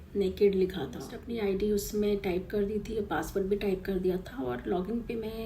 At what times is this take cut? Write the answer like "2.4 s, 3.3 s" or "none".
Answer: 1.1 s

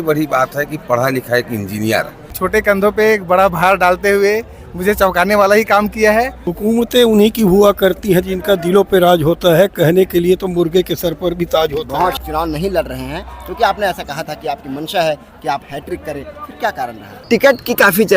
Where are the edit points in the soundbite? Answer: 2.3 s, 6.4 s, 12.2 s, 17.2 s

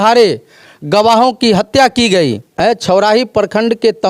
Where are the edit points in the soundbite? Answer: 2.6 s

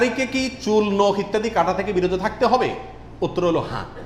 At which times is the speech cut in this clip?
none

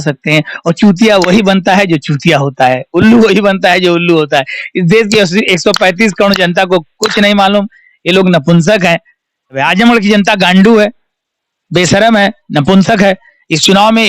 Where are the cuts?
9.6 s

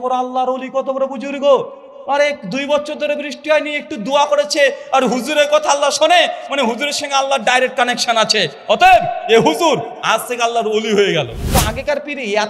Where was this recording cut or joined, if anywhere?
11.4 s

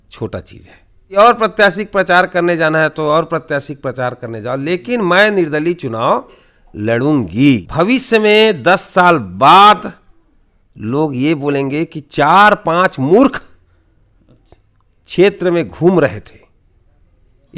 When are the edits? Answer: 1.2 s, 7.7 s

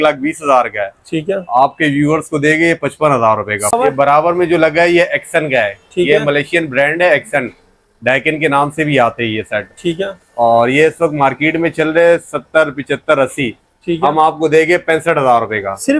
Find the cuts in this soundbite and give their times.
3.7 s

